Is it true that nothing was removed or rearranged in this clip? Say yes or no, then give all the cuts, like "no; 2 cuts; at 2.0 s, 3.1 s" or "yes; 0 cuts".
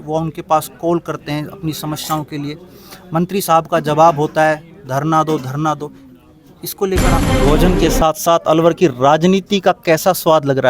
no; 1 cut; at 7.3 s